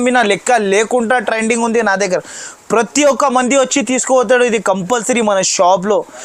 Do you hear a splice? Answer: no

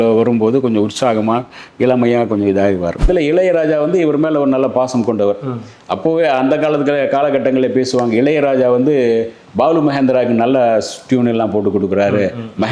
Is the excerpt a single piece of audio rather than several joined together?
no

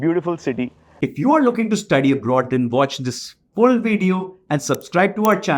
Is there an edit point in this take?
yes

